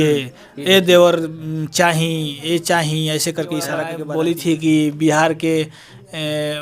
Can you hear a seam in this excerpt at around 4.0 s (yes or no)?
yes